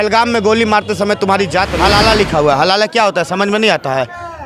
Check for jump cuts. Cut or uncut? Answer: cut